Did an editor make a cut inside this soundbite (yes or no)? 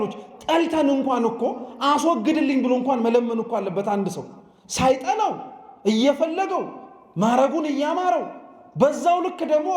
no